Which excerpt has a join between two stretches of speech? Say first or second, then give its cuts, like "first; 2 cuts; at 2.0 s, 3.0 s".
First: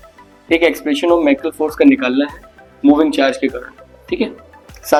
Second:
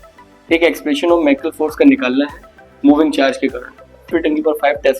second; 1 cut; at 4.1 s